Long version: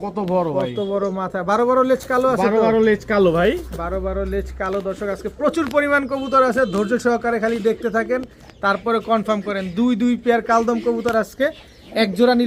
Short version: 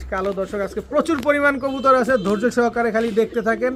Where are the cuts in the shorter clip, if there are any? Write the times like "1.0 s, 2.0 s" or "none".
none